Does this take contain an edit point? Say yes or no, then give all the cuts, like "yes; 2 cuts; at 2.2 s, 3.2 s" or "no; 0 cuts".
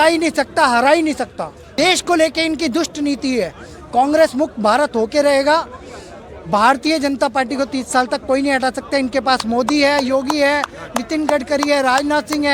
no; 0 cuts